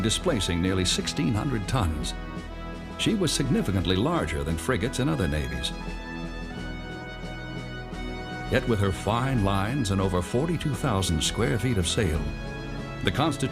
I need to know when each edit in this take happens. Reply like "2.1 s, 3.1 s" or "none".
4.1 s